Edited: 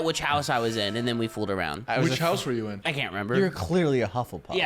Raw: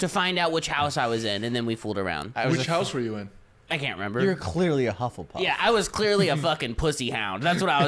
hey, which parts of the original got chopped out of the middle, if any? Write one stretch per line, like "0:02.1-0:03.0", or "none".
0:03.3-0:03.7